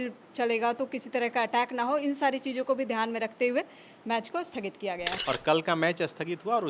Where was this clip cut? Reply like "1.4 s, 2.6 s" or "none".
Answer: 5.2 s